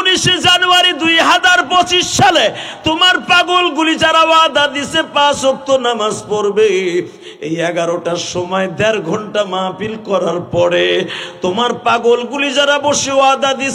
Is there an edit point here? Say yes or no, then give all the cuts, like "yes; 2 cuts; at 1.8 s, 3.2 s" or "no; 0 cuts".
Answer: no; 0 cuts